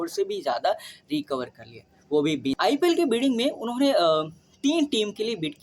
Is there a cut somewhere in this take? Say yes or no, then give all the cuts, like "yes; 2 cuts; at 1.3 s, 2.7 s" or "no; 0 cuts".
yes; 1 cut; at 2.5 s